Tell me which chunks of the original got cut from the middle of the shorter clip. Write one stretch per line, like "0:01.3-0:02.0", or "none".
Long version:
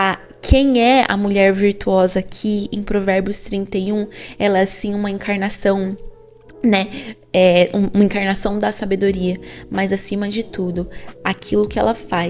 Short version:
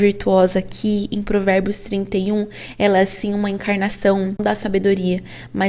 0:06.0-0:08.6

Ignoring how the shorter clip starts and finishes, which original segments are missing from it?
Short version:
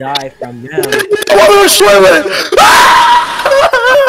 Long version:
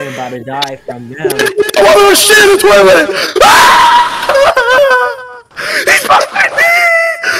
0:02.2-0:02.6

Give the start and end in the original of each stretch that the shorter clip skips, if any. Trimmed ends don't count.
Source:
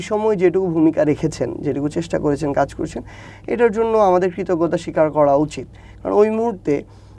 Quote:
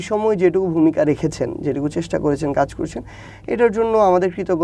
none

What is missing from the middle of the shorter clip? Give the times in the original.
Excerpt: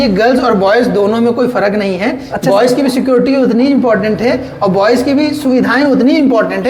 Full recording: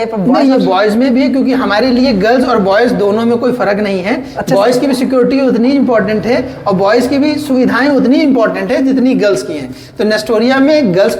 none

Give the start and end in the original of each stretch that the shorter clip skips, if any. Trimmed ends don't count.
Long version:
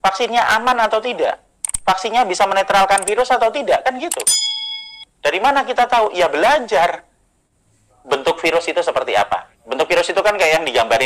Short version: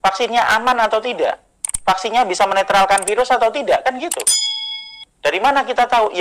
none

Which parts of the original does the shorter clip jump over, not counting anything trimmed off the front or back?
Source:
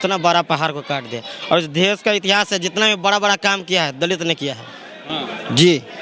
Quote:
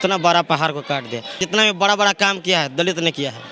0:01.4-0:02.6

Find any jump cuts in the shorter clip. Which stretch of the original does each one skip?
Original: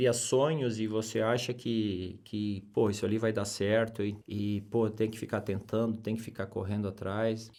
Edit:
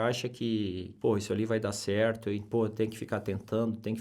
0:02.2-0:02.6
0:04.1-0:04.6

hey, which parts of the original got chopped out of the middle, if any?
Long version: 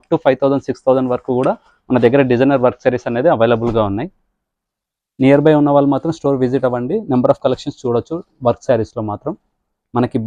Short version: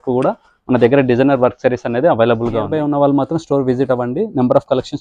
0:03.9-0:05.5

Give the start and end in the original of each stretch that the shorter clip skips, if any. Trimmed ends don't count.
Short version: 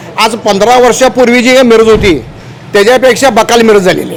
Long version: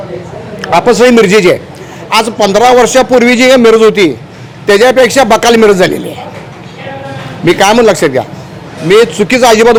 none

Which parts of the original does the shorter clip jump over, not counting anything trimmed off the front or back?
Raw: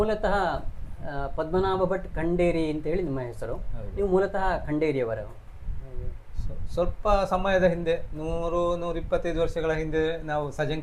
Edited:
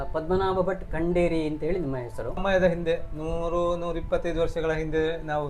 0:03.6-0:07.4

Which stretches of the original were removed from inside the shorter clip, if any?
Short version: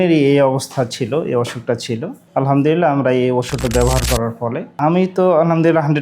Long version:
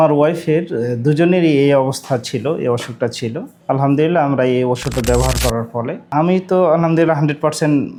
none

